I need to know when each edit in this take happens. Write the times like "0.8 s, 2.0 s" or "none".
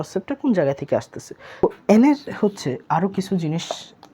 1.6 s